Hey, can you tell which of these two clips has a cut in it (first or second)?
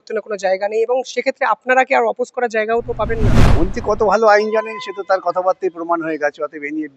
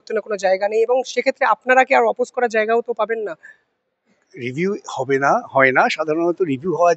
first